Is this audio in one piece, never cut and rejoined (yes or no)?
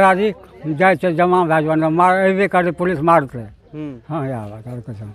yes